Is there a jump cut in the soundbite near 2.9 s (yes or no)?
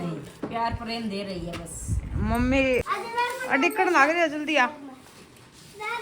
yes